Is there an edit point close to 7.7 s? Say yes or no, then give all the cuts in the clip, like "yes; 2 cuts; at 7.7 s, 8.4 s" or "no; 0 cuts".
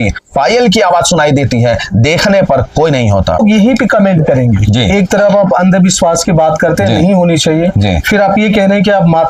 no; 1 cut; at 3.4 s